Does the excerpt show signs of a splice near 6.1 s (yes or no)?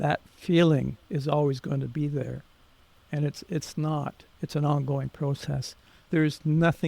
yes